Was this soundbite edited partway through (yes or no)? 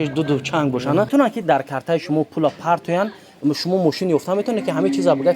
yes